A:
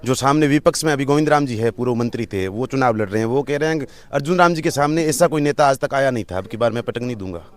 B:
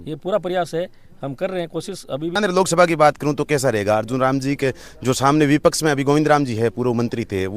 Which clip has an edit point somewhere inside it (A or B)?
B